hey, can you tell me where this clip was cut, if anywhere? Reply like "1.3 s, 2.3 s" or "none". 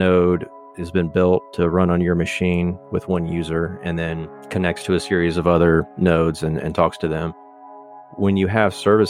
8.0 s